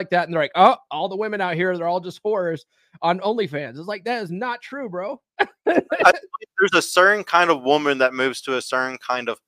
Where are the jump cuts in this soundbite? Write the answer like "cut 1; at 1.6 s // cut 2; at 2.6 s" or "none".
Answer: none

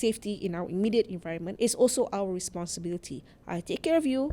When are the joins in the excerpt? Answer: cut 1; at 1.4 s

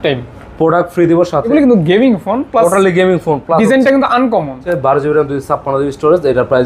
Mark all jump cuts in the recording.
cut 1; at 1.5 s // cut 2; at 4.7 s

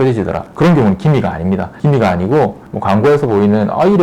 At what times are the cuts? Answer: cut 1; at 2.6 s

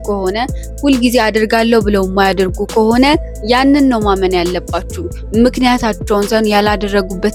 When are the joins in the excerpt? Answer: none

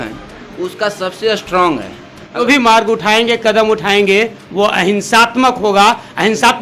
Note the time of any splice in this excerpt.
cut 1; at 2.4 s

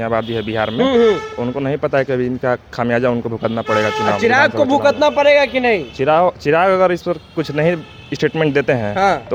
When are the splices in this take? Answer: none

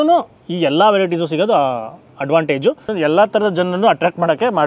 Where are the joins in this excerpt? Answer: cut 1; at 2.9 s

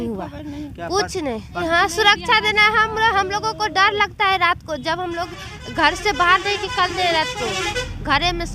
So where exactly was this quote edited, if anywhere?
none

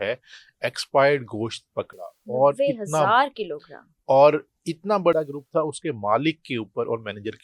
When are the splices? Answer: none

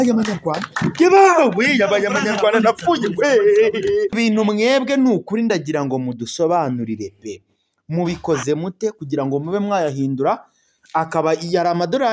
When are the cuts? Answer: cut 1; at 4.1 s

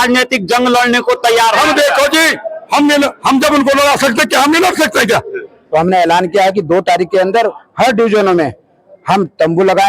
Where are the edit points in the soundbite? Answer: cut 1; at 5.6 s

